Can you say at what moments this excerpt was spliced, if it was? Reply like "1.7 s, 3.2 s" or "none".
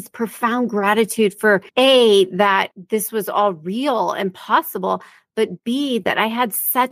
1.7 s, 2.8 s